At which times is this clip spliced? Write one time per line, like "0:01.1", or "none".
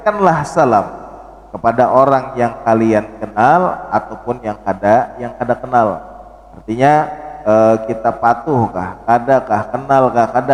none